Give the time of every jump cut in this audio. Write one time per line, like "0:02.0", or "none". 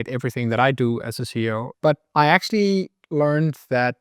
0:01.7